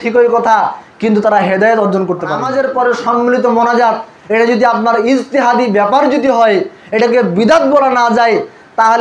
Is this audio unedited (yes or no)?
no